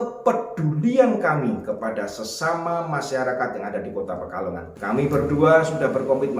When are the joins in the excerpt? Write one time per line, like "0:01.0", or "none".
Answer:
0:04.7

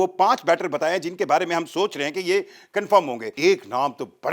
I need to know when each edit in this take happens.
0:03.3

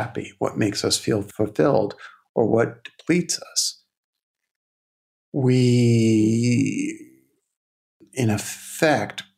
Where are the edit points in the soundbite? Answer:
0:01.3
0:08.0

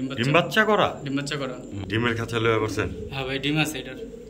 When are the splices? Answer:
0:01.8

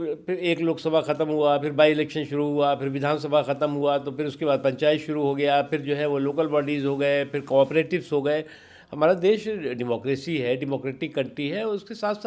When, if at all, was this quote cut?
none

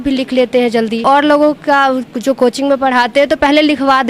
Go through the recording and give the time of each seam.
0:01.0

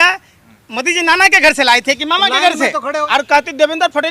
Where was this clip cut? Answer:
0:03.1

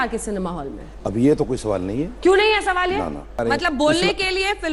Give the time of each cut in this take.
0:03.4

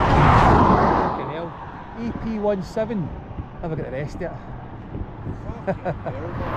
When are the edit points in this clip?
none

